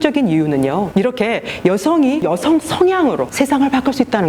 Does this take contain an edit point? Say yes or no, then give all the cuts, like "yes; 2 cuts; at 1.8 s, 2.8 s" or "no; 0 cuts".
yes; 3 cuts; at 0.9 s, 2.2 s, 3.3 s